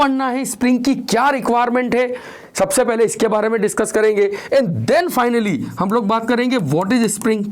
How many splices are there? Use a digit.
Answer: 0